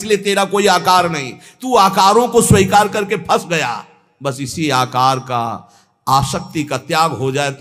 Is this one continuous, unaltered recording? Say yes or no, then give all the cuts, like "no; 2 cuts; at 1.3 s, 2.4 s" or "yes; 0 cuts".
yes; 0 cuts